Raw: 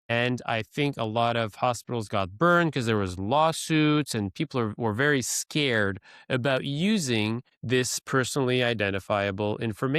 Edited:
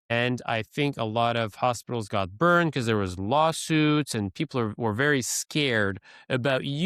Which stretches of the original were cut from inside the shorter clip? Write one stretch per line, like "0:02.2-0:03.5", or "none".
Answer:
none